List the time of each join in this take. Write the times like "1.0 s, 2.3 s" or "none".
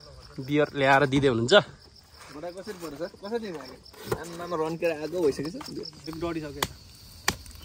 6.1 s